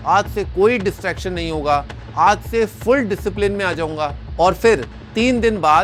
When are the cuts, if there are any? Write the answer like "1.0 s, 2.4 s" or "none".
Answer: none

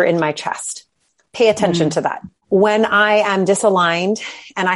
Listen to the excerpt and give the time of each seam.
2.3 s

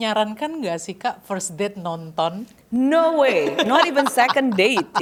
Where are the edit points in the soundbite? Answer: none

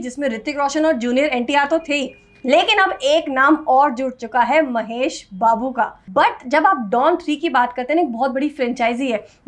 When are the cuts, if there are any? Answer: 6.0 s

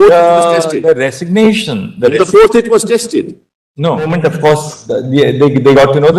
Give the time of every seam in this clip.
4.1 s

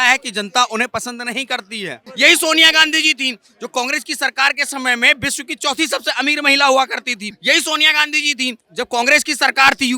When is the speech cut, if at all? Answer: 2.0 s, 7.3 s

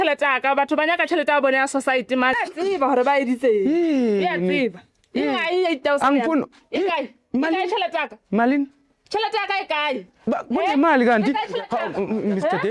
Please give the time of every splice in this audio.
2.3 s

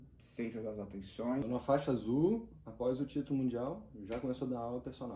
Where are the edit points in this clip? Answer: 1.4 s

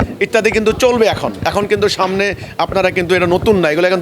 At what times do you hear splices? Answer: none

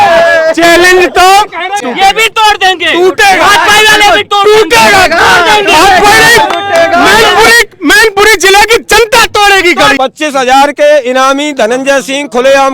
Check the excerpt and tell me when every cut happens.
1.8 s, 10.0 s

